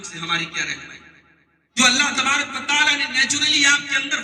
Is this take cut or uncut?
cut